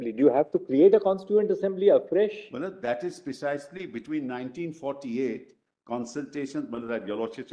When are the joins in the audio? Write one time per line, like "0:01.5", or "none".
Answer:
none